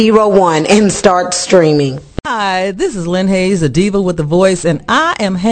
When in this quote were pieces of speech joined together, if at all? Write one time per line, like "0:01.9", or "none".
0:02.3